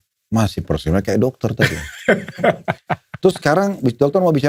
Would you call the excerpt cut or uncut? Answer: uncut